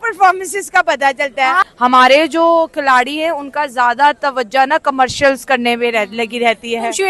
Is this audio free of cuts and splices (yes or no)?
no